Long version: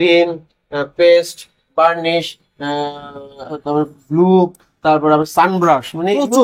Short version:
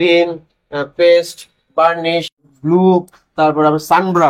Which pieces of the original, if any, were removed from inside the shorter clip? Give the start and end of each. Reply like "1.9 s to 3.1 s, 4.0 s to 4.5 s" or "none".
2.5 s to 4.0 s